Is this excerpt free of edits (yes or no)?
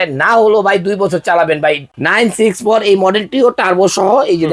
no